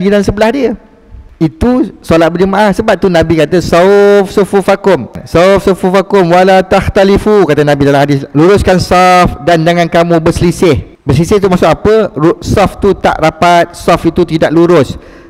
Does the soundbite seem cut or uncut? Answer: uncut